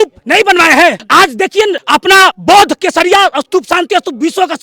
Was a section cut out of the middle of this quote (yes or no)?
yes